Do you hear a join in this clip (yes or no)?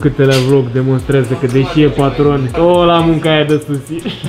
no